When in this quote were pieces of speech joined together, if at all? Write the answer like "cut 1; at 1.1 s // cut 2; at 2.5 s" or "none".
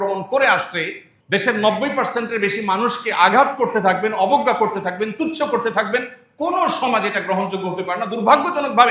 cut 1; at 1.1 s